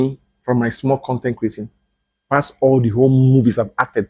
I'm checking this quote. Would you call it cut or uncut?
uncut